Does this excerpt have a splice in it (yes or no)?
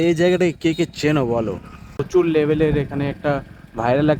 yes